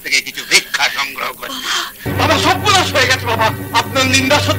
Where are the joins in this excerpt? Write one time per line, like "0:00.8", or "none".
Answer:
0:01.9

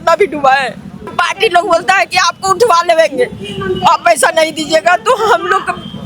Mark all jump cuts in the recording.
0:01.1

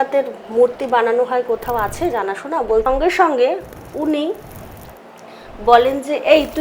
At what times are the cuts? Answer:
0:02.9

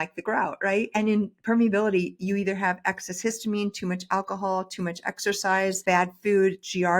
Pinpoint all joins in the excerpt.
0:00.9
0:05.8

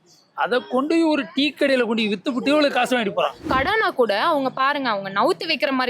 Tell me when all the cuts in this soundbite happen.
0:03.4

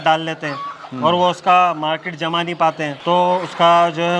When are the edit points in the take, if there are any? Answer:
0:02.9

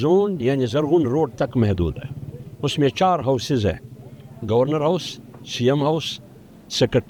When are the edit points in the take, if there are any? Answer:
none

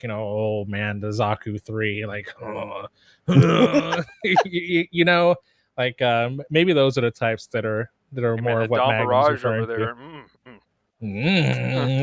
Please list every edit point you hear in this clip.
none

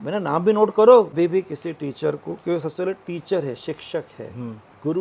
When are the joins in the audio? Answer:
0:01.1

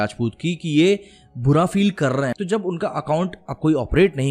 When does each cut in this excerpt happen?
0:02.3

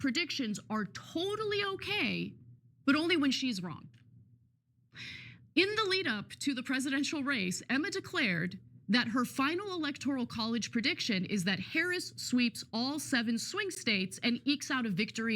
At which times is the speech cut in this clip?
0:13.8

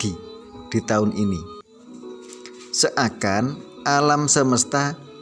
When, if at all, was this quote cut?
0:01.4
0:02.8

